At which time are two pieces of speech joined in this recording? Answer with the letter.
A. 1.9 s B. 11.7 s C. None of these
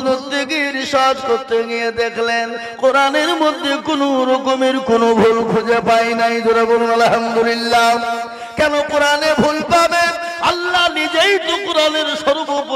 C